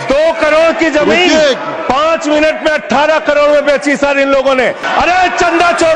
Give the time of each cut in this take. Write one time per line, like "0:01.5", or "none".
0:04.8

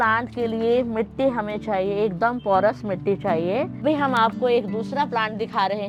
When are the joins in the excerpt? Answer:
none

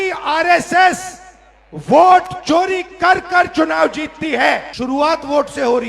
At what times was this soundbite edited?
0:04.7

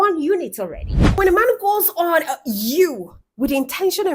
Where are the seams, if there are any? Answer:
0:01.0

